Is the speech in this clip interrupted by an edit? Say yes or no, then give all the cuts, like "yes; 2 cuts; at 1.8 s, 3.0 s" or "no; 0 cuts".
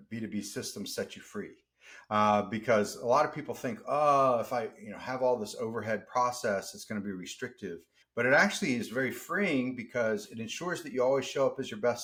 no; 0 cuts